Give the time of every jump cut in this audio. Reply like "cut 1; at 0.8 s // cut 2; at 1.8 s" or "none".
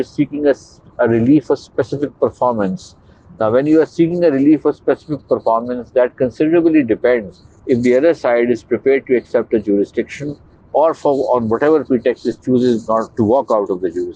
none